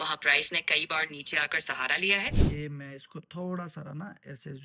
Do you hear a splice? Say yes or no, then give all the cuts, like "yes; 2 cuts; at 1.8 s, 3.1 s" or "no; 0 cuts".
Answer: yes; 1 cut; at 2.4 s